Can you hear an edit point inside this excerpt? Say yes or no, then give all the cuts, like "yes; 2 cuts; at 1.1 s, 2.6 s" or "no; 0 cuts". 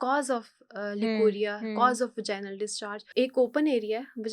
yes; 1 cut; at 3.0 s